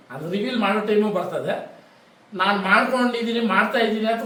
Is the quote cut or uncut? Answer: uncut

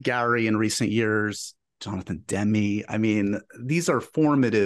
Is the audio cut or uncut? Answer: uncut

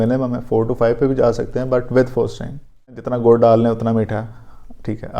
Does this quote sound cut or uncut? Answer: cut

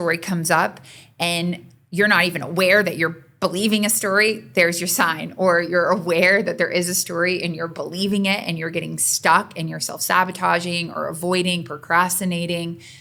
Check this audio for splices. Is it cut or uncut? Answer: uncut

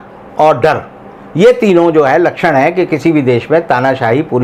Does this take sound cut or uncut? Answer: uncut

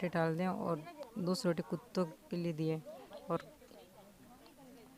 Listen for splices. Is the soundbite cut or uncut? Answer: uncut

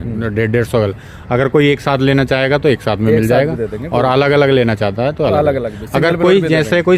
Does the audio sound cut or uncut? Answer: uncut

